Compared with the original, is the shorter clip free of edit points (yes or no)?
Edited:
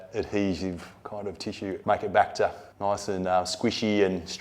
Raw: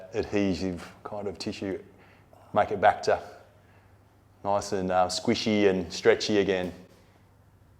no